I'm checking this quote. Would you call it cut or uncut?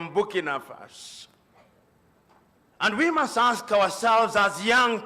cut